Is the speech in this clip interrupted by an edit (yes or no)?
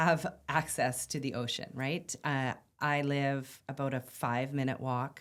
no